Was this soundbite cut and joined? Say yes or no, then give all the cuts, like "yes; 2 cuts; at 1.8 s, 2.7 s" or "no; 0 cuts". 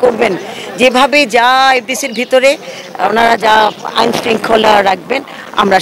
no; 0 cuts